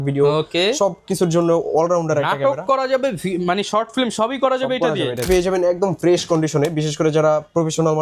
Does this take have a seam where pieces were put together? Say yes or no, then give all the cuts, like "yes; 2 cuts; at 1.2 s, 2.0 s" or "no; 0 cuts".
yes; 1 cut; at 5.2 s